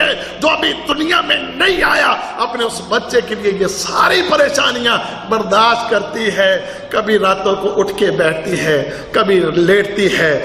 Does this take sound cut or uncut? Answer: uncut